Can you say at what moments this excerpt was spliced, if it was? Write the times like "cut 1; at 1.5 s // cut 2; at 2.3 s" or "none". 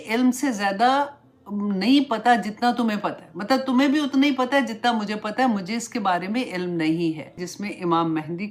cut 1; at 7.5 s